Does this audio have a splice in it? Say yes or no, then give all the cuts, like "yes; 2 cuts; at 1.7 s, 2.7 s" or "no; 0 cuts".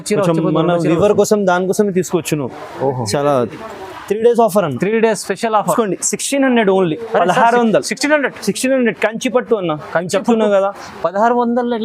yes; 1 cut; at 5.7 s